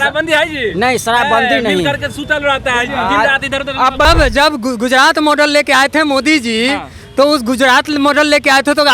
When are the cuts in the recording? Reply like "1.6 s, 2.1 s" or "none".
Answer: 4.1 s